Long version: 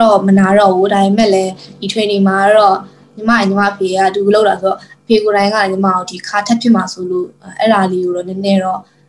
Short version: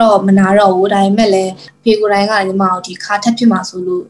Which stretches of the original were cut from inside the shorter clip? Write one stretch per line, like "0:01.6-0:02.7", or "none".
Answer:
0:01.7-0:04.9

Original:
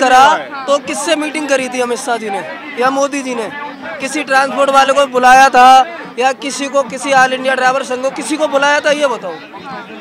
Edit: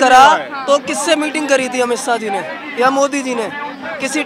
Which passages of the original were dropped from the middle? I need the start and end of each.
none

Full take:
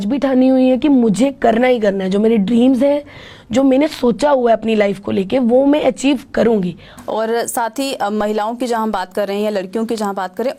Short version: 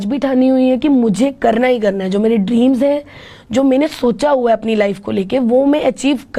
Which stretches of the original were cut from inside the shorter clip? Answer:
none

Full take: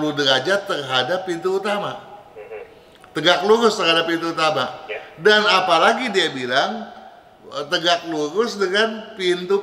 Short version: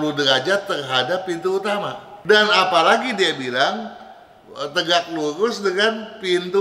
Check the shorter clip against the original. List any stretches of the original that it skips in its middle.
0:02.1-0:05.0

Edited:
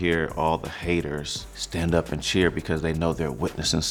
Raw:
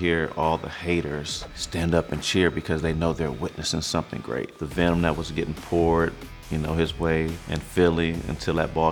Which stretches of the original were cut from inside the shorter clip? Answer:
none

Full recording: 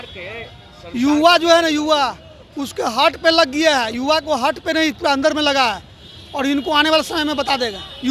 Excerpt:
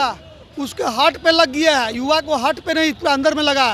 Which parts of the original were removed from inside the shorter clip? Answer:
none

